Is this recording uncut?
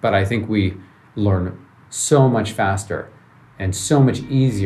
no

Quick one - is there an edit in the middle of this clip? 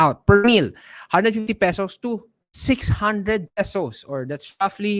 no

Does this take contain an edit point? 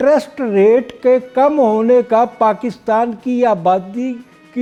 no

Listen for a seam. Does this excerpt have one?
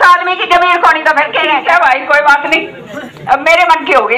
yes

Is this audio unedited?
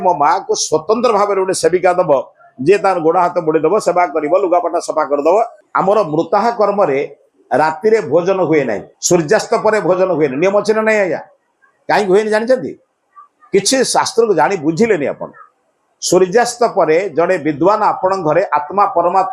no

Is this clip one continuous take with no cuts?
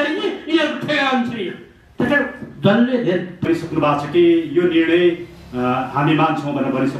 no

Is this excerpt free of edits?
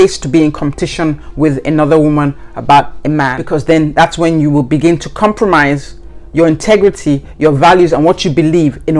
no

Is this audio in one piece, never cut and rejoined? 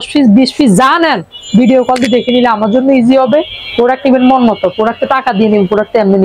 yes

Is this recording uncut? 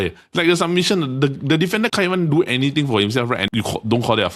no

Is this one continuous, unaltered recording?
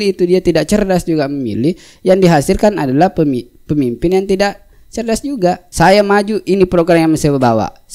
no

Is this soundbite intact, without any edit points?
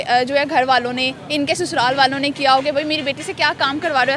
yes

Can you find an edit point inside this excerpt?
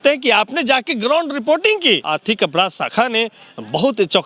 yes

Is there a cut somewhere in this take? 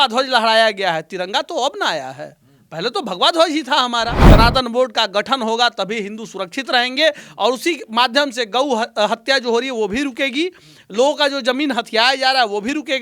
yes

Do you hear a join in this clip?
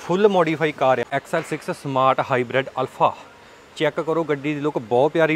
yes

